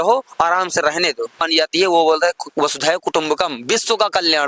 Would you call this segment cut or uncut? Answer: cut